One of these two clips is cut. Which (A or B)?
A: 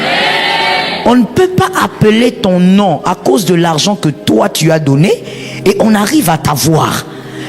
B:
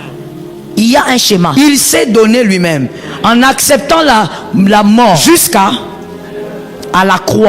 B